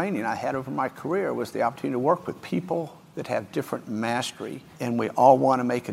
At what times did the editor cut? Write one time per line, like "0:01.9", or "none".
0:02.4
0:04.6